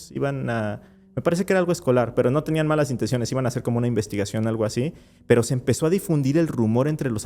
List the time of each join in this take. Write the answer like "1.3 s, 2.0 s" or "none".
none

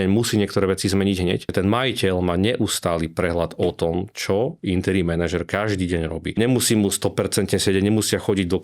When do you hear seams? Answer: 1.5 s, 6.4 s

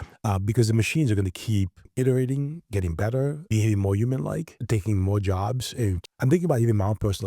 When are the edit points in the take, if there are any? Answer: 1.9 s, 3.4 s, 4.5 s, 6.0 s

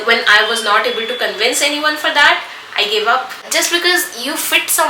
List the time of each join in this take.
3.4 s

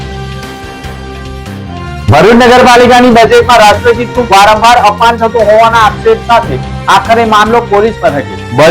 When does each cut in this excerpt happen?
0.9 s

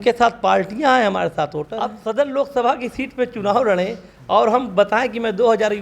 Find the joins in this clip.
1.8 s

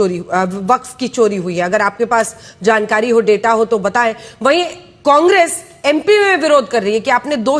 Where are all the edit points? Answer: none

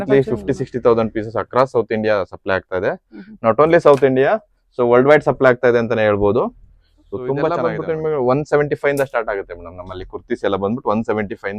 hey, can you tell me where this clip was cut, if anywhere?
7.6 s

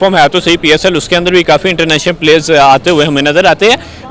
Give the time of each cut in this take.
none

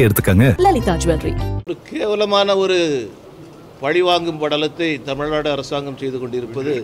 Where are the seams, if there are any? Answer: 1.5 s

